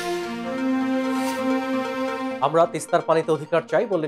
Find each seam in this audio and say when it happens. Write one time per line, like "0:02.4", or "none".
0:02.3